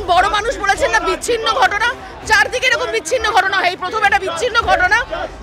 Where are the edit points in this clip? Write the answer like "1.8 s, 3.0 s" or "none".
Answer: none